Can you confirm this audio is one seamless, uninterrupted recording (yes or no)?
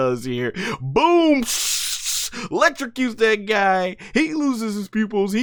yes